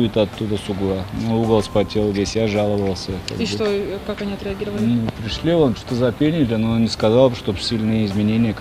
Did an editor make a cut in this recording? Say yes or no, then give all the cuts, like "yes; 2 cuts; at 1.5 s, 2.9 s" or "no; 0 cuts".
no; 0 cuts